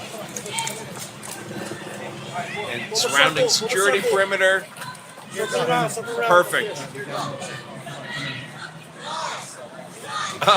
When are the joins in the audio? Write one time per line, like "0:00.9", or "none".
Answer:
none